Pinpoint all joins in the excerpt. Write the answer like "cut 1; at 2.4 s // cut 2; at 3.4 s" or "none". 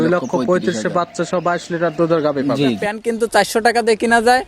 cut 1; at 2.9 s